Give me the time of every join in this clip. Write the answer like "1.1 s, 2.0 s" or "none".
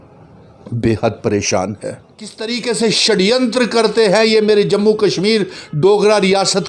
2.4 s